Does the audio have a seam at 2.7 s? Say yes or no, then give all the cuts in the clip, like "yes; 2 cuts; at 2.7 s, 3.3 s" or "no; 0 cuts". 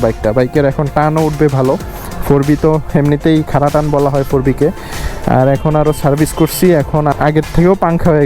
no; 1 cut; at 7.1 s